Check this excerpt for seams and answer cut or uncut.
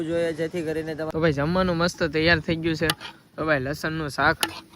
cut